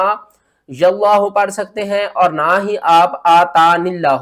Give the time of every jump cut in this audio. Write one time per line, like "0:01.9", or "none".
none